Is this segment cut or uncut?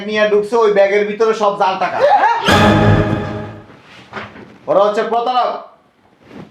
uncut